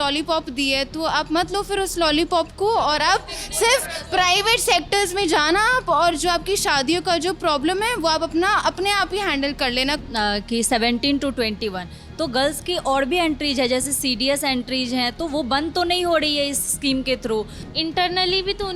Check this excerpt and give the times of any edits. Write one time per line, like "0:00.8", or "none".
0:10.0
0:17.6